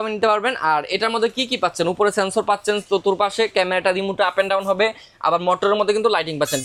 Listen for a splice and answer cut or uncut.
uncut